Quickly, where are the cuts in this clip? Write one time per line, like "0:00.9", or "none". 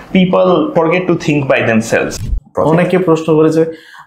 0:00.7
0:02.1